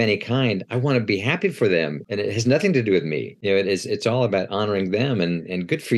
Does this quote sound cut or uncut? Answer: cut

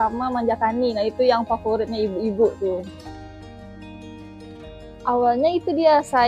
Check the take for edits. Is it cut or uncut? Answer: cut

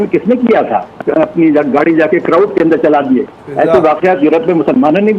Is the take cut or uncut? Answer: cut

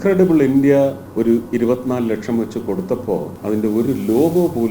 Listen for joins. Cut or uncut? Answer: cut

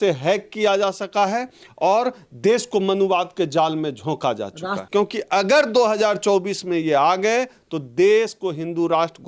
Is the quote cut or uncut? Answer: cut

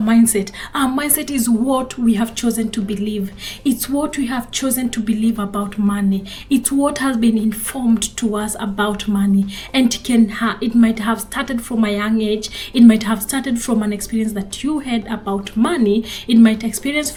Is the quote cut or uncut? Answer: uncut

